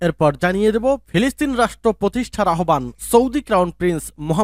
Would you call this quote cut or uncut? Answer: uncut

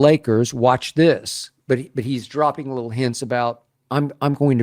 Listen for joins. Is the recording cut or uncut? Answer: cut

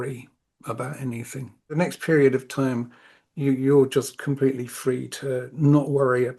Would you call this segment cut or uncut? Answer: cut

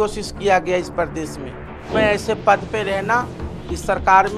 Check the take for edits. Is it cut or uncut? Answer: cut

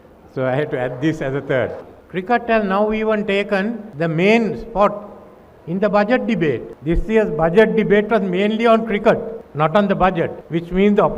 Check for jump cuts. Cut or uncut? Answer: cut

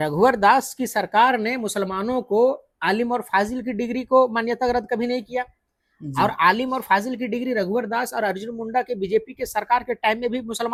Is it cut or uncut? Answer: uncut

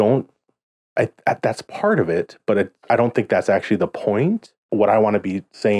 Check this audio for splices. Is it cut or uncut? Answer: cut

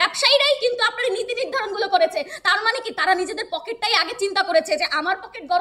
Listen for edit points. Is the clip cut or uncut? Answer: uncut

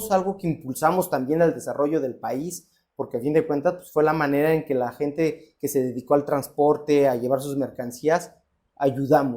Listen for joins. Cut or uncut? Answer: uncut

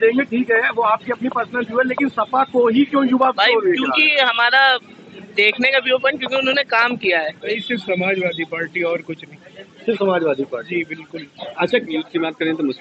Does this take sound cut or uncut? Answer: cut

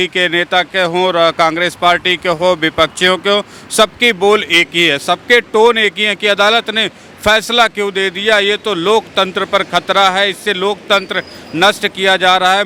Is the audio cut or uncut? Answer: uncut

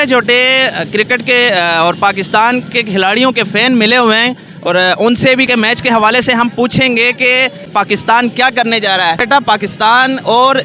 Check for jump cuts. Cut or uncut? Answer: cut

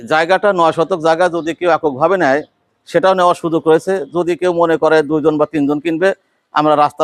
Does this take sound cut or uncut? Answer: uncut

